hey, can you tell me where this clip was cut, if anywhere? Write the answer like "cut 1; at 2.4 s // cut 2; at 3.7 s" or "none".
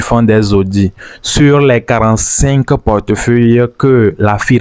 none